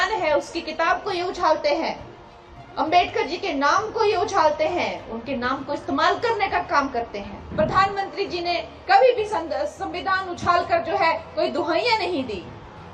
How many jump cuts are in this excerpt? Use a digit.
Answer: 1